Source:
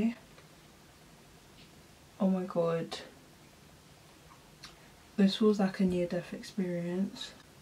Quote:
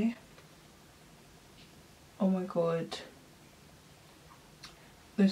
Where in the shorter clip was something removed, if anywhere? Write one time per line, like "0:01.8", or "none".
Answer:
none